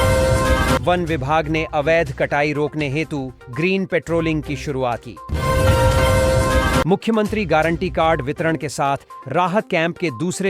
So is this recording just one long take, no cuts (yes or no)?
yes